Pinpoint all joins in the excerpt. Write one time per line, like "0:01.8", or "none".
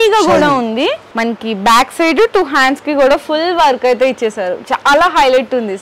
0:01.1